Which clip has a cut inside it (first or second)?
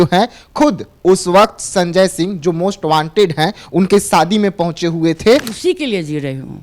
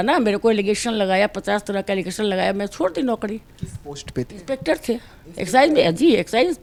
first